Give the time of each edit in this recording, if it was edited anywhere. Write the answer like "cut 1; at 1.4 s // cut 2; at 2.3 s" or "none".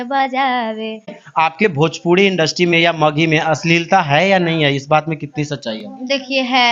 cut 1; at 1.2 s